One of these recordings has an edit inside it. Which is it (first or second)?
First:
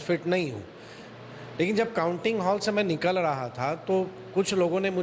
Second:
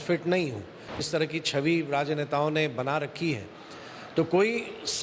second